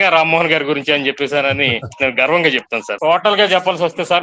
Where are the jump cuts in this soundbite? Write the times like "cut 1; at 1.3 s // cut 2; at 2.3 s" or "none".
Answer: cut 1; at 2.8 s

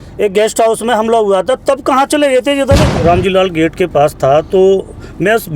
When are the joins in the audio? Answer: cut 1; at 2.9 s

